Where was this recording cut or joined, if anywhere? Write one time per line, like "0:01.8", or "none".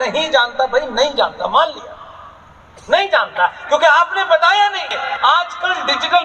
0:05.2